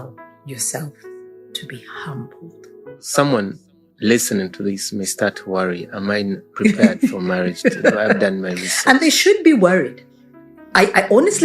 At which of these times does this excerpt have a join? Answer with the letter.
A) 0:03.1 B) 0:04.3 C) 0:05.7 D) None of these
A